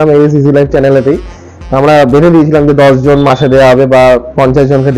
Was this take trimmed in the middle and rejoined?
no; 0 cuts

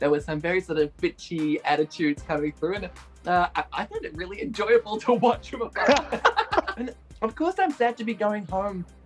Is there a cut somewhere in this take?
yes; 1 cut; at 6.8 s

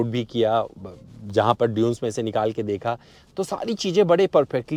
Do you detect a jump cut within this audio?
no; 0 cuts

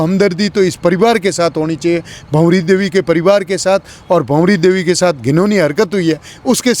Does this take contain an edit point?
no; 0 cuts

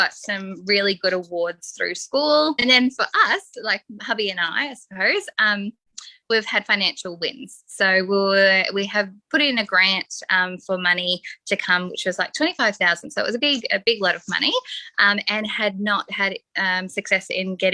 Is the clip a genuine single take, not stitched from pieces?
no; 1 cut; at 2.6 s

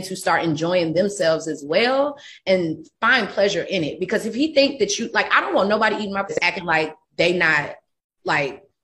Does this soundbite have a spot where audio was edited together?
yes; 1 cut; at 6.3 s

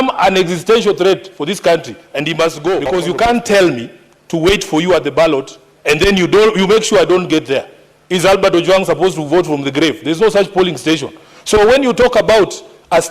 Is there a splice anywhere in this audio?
yes; 1 cut; at 2.8 s

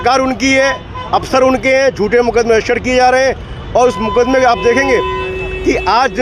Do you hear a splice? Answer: no; 0 cuts

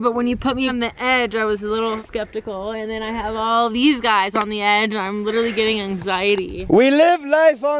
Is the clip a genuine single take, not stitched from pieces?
no; 2 cuts; at 0.7 s, 2.0 s

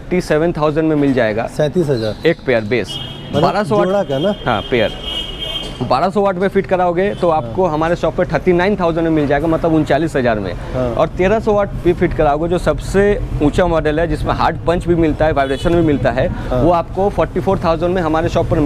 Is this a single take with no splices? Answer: yes; 0 cuts

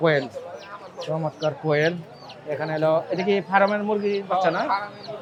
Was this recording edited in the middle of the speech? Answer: no; 0 cuts

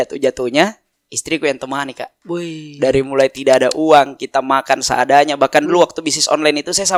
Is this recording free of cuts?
yes; 0 cuts

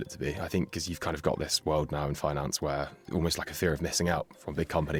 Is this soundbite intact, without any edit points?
yes; 0 cuts

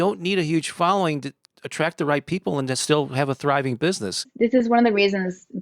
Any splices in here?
yes; 2 cuts; at 1.4 s, 4.3 s

